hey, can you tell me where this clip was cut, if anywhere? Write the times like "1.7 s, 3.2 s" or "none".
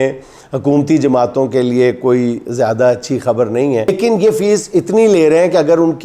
3.9 s